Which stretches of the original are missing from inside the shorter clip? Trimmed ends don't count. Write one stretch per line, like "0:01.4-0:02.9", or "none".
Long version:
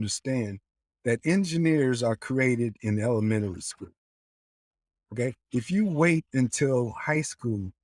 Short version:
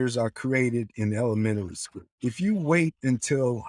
0:04.0-0:05.4